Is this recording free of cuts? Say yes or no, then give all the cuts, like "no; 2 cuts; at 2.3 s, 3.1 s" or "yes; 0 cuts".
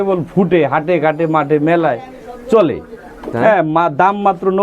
no; 1 cut; at 3.3 s